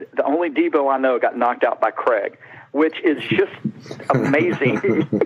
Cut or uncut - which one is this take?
uncut